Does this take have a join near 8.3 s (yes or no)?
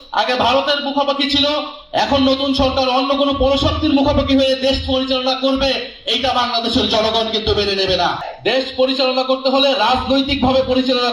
yes